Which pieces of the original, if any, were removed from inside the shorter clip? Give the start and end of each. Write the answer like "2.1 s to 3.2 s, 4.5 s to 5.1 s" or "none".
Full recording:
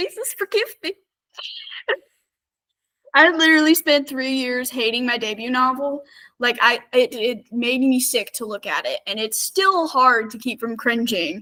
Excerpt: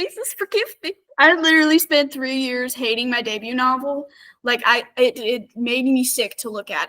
1.0 s to 3.0 s